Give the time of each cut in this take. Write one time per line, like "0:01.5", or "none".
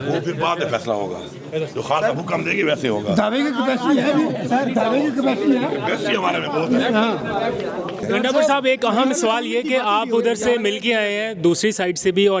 none